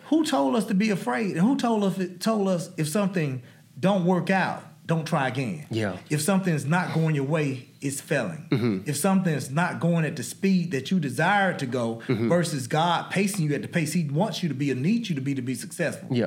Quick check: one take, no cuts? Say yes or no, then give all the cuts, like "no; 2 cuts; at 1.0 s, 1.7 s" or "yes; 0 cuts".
yes; 0 cuts